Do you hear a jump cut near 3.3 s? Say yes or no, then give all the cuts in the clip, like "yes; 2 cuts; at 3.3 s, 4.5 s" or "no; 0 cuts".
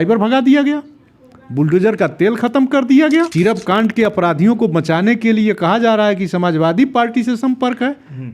yes; 1 cut; at 3.3 s